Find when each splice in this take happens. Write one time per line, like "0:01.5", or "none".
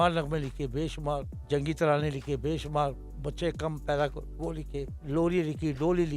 0:01.4
0:05.0